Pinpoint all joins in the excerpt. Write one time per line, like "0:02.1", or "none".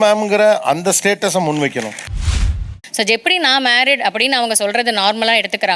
0:02.6